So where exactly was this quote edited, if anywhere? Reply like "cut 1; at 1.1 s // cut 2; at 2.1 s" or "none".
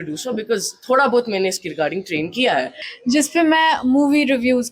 cut 1; at 2.7 s